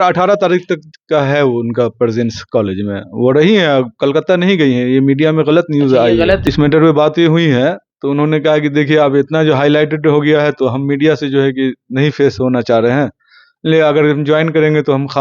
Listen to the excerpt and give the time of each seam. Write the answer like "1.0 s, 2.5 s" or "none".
6.4 s

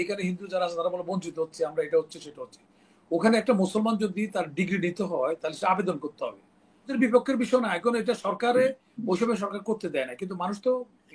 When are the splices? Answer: 6.9 s

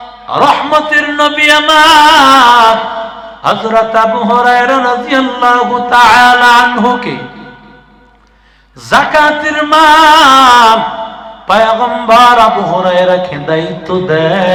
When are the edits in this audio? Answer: none

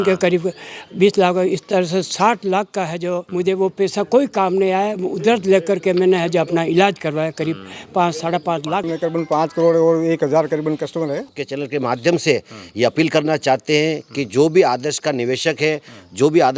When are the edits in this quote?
3.2 s, 8.9 s, 11.4 s

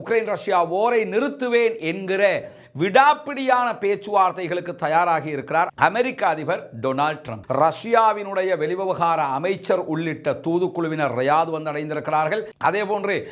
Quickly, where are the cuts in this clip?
7.3 s

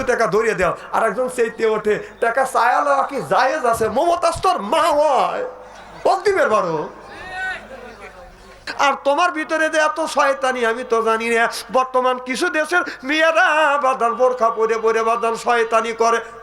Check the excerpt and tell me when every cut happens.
8.7 s

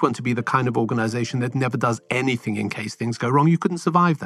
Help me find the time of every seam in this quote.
none

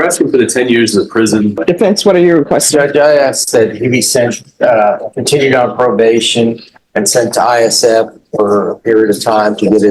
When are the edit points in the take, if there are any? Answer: 1.6 s

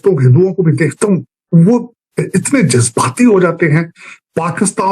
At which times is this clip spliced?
none

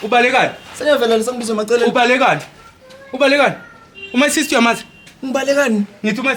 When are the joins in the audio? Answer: none

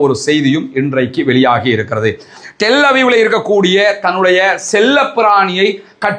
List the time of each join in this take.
2.4 s

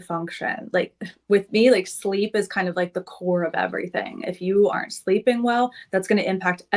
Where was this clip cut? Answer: none

